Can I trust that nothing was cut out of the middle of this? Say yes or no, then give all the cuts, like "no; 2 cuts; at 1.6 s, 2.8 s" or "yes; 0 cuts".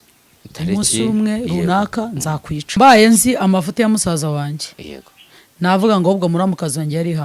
no; 1 cut; at 2.8 s